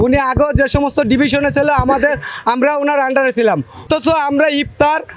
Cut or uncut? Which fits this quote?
cut